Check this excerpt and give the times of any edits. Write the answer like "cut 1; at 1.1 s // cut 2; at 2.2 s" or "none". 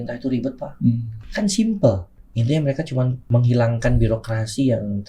cut 1; at 1.2 s // cut 2; at 3.2 s